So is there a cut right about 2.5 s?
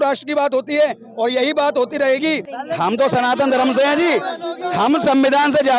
yes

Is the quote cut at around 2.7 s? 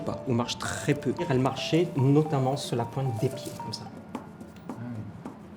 yes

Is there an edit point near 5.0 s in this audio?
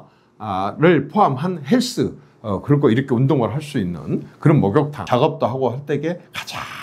yes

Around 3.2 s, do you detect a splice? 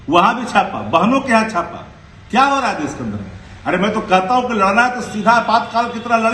no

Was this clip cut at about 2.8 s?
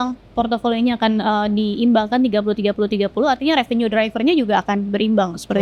no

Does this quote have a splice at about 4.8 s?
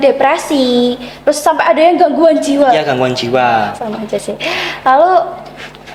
no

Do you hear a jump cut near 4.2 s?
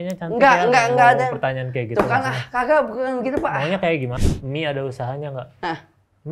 yes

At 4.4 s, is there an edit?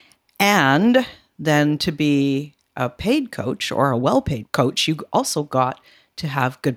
yes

